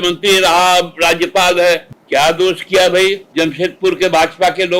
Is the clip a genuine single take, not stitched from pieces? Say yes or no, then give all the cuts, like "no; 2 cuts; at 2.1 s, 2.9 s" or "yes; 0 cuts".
no; 2 cuts; at 1.9 s, 3.2 s